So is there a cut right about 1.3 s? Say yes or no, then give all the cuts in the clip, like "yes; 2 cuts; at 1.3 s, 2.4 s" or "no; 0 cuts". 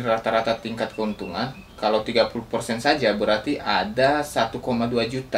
no; 0 cuts